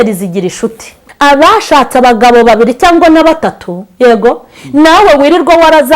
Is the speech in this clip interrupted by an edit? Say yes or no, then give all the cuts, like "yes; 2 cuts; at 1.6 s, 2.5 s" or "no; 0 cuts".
yes; 1 cut; at 1.0 s